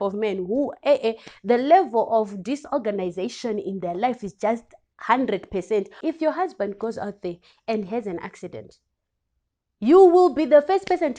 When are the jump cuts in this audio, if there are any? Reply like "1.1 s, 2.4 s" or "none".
5.9 s